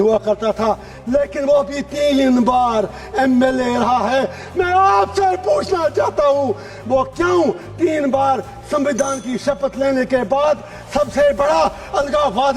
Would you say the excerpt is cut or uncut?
uncut